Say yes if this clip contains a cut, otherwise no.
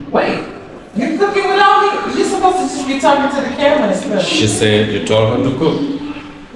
no